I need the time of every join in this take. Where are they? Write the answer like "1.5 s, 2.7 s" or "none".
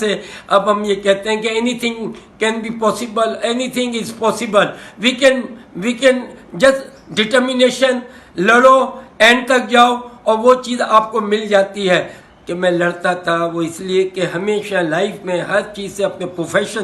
12.2 s